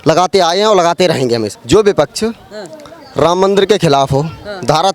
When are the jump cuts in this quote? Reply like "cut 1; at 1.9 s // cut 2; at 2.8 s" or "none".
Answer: cut 1; at 1.5 s